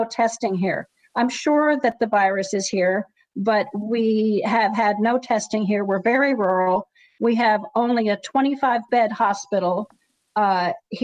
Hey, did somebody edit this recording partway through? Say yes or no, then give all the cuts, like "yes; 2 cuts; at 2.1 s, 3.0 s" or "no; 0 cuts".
no; 0 cuts